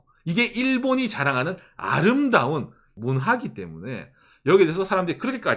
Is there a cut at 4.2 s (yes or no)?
no